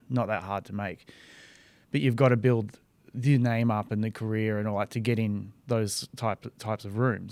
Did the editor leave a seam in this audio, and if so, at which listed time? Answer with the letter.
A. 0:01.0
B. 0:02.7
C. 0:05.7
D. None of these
D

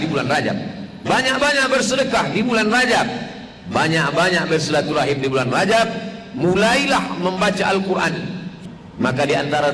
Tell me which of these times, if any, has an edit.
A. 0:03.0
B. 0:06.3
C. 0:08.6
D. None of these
C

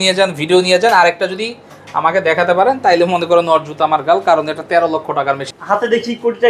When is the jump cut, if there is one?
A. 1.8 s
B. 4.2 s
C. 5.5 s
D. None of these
C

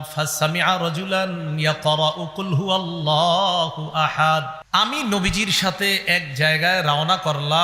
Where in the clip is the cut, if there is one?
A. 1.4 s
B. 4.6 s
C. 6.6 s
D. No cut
B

